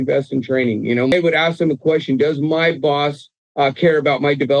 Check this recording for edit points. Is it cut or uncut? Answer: cut